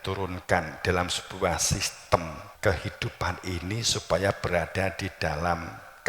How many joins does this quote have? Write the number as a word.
one